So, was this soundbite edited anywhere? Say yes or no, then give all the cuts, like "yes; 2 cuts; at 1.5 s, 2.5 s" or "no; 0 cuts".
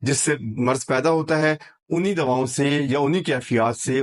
no; 0 cuts